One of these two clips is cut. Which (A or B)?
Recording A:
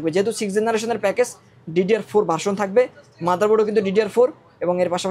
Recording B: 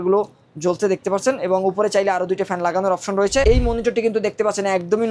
B